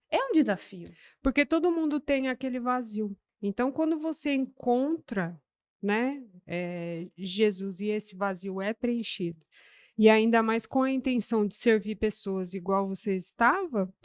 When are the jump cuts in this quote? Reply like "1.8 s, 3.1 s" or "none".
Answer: 3.2 s